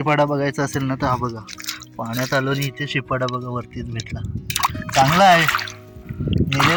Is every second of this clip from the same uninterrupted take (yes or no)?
yes